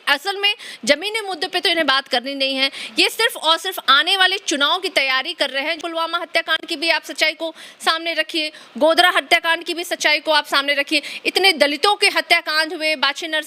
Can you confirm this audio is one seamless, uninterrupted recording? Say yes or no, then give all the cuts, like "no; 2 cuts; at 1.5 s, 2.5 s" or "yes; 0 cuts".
no; 1 cut; at 5.8 s